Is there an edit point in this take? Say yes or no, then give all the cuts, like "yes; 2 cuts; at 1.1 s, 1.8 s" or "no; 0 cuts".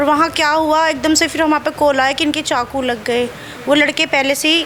no; 0 cuts